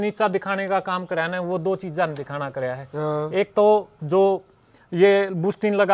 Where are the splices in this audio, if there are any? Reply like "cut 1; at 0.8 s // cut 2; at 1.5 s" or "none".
none

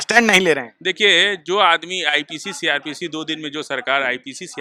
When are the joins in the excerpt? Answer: none

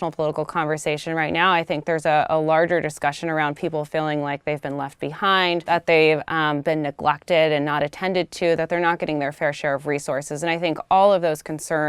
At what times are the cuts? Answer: cut 1; at 5.7 s

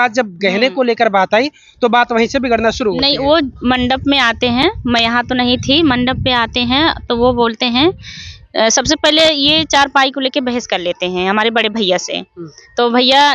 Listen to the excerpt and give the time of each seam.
none

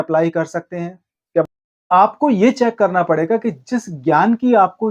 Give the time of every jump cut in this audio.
cut 1; at 1.4 s

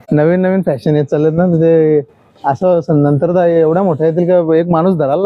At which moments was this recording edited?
none

